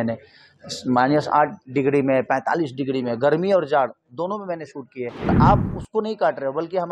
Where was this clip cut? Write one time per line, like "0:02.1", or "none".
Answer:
0:05.3